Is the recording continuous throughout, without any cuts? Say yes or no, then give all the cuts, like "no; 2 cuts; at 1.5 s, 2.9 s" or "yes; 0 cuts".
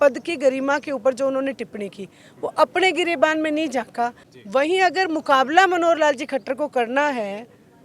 no; 1 cut; at 4.3 s